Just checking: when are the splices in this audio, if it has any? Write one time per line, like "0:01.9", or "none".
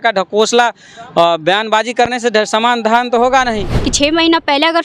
0:03.8